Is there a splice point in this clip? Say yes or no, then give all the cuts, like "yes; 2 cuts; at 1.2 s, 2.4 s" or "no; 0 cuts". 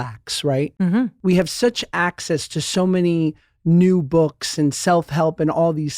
yes; 1 cut; at 1.0 s